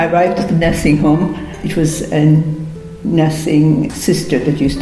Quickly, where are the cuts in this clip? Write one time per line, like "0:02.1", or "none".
0:01.6
0:03.9

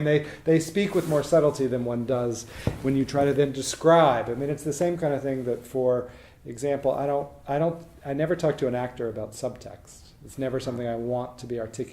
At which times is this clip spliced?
none

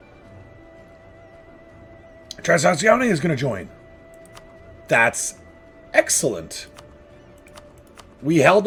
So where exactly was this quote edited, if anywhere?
none

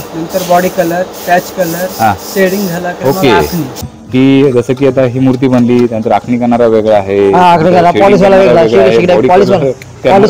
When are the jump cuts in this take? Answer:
0:03.8

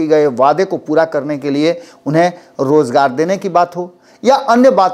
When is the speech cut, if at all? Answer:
none

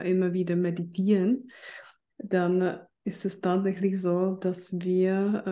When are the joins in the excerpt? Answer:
none

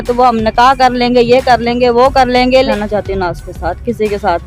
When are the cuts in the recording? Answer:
0:02.7

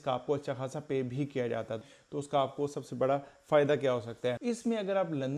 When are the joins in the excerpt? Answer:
0:01.9
0:04.4

